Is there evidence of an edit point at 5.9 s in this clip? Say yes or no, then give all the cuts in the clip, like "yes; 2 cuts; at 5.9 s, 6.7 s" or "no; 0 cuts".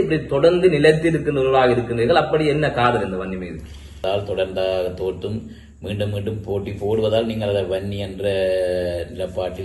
no; 1 cut; at 4.0 s